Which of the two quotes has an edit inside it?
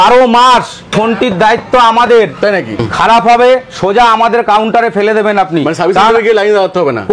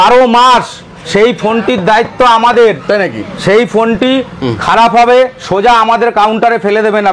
first; 2 cuts; at 0.9 s, 2.8 s

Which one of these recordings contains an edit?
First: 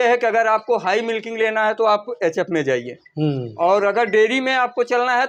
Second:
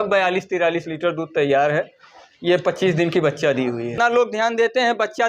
second; 1 cut; at 3.9 s

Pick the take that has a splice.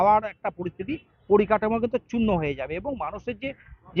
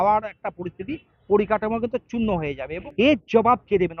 second; 1 cut; at 2.8 s

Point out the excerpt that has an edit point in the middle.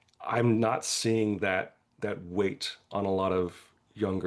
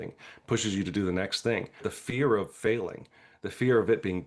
second; 1 cut; at 1.9 s

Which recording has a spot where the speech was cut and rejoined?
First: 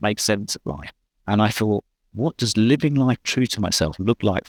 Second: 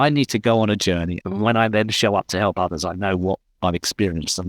second; 1 cut; at 1.2 s

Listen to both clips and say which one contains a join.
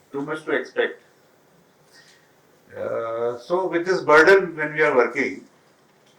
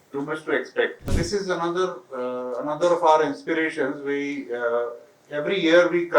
second; 1 cut; at 1.1 s

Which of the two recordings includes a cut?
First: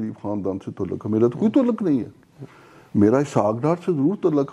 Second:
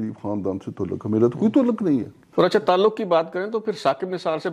second; 1 cut; at 2.2 s

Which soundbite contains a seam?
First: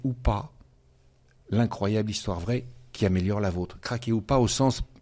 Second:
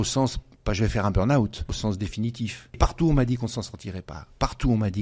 second; 2 cuts; at 1.7 s, 2.8 s

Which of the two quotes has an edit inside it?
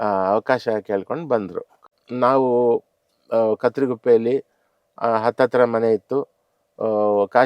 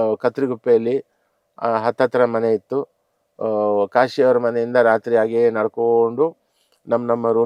first; 1 cut; at 1.8 s

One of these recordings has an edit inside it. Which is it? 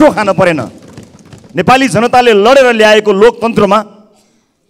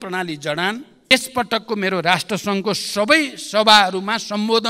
second; 1 cut; at 1.1 s

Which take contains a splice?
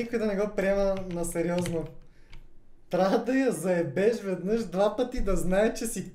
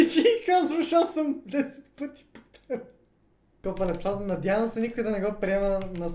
second; 1 cut; at 3.5 s

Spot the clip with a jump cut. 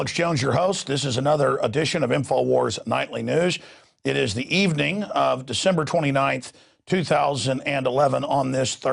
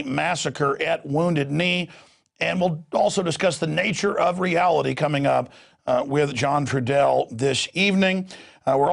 first; 1 cut; at 3.9 s

